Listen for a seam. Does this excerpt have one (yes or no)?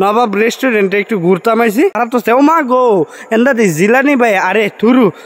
yes